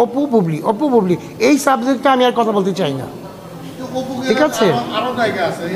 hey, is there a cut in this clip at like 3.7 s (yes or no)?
no